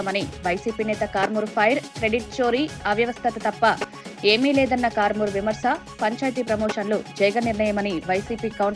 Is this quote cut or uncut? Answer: uncut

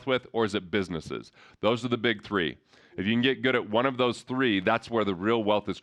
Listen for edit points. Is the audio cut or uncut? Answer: uncut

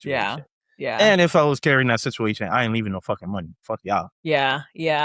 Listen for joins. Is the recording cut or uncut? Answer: cut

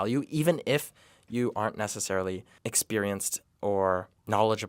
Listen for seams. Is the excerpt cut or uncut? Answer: uncut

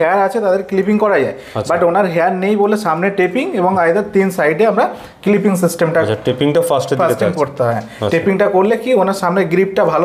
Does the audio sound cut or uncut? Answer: uncut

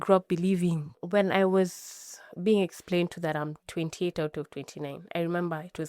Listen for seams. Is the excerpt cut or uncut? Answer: cut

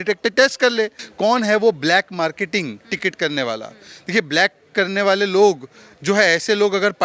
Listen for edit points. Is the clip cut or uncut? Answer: cut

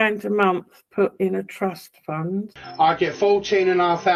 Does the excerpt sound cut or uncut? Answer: uncut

